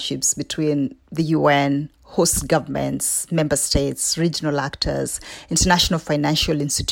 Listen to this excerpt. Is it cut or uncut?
uncut